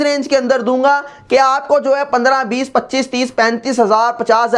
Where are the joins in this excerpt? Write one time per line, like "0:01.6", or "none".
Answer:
none